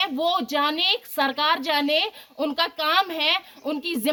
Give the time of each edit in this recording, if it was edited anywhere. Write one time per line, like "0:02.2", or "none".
none

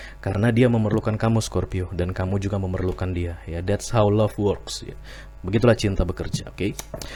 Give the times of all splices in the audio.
none

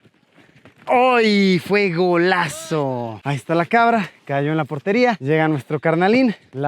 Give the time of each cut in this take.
0:03.2

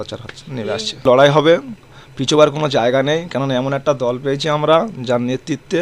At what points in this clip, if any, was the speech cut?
0:01.0

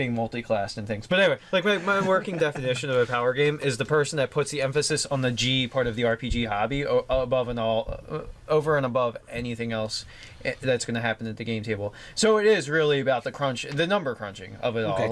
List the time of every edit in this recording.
none

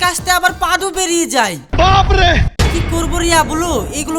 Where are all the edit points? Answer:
0:02.6

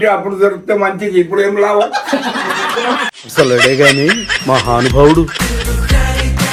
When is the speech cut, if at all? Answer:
none

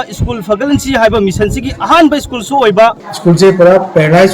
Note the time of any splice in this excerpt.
0:03.0

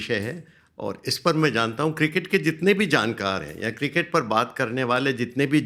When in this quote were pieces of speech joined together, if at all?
none

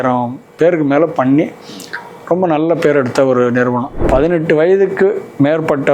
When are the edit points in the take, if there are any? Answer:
0:03.9

